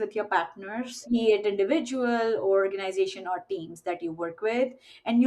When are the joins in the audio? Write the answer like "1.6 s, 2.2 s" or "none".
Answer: 1.0 s